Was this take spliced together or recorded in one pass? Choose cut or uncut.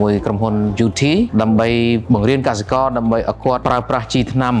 cut